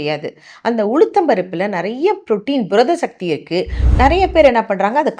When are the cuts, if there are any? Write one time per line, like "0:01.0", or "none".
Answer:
0:03.8